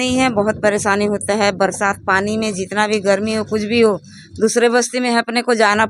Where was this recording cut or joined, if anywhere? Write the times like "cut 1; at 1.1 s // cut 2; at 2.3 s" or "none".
none